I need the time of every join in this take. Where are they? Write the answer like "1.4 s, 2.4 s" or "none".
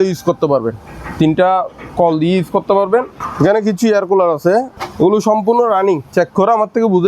3.2 s, 4.8 s